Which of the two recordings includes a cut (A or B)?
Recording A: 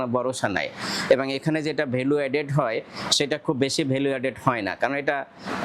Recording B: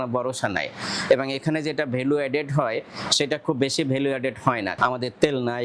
B